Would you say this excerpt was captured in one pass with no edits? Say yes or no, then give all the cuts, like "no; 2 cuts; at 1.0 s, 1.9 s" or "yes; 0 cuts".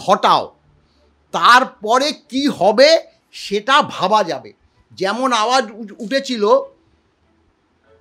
yes; 0 cuts